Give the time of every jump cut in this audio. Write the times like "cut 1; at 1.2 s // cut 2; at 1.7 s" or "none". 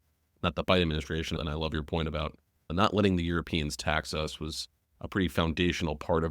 cut 1; at 1.4 s // cut 2; at 2.6 s